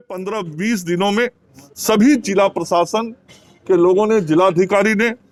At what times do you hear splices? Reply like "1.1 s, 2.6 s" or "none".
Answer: none